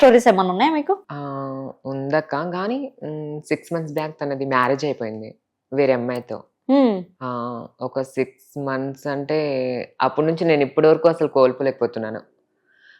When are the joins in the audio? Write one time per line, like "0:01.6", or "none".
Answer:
none